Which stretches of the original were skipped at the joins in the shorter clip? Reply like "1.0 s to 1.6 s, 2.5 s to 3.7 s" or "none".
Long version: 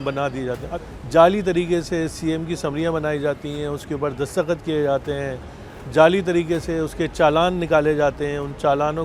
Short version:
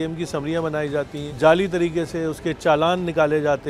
3.5 s to 5.8 s